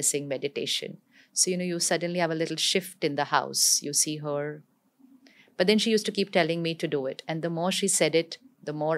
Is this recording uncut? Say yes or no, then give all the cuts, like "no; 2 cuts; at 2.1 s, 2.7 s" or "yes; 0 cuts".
yes; 0 cuts